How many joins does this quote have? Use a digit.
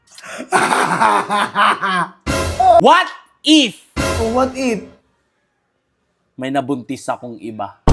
1